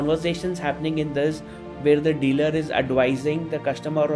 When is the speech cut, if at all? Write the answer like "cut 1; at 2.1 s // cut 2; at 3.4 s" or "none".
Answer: none

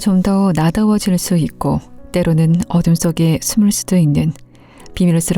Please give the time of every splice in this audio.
none

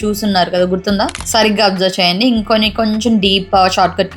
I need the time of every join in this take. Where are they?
cut 1; at 1.2 s

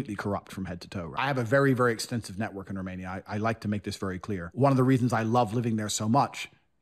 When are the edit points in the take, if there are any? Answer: cut 1; at 1.1 s // cut 2; at 4.5 s

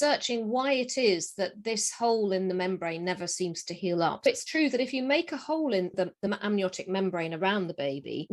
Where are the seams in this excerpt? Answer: cut 1; at 4.3 s // cut 2; at 5.9 s

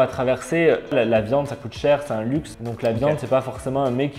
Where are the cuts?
cut 1; at 0.9 s // cut 2; at 2.6 s

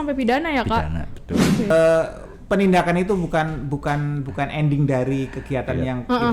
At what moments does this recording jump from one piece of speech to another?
cut 1; at 1.7 s

